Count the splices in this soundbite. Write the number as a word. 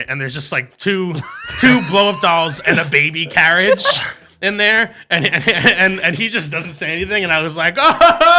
zero